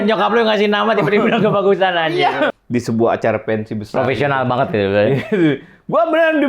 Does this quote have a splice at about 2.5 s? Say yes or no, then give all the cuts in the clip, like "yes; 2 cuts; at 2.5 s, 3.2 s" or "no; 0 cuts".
yes; 1 cut; at 2.5 s